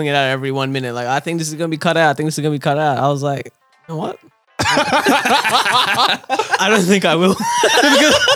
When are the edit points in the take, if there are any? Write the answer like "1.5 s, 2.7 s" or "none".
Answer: none